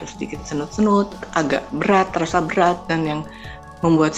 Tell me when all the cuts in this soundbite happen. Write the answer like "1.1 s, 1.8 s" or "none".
1.2 s